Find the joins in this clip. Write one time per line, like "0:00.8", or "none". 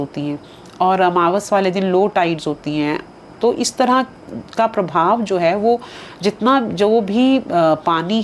none